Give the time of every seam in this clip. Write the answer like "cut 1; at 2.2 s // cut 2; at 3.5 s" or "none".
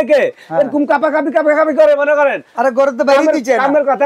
none